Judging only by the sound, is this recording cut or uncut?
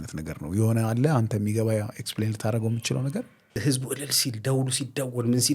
cut